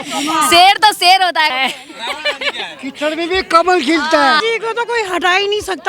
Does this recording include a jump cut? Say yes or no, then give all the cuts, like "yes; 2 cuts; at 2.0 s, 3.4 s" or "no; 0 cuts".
yes; 1 cut; at 4.4 s